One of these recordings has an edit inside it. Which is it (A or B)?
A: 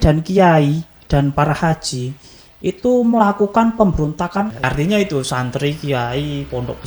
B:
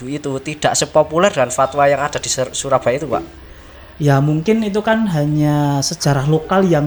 A